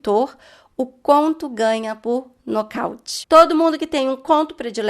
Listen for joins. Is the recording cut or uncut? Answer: cut